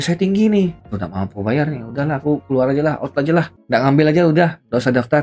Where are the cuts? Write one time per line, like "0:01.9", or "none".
0:00.8
0:03.6